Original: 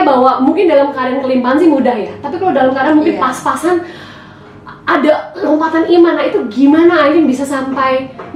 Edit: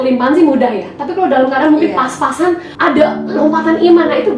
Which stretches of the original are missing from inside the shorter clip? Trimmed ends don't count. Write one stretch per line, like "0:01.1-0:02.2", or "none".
0:03.9-0:04.8